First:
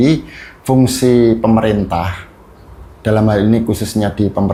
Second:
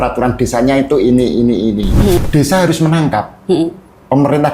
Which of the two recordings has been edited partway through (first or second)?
second